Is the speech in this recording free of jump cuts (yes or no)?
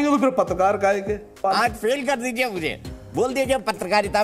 no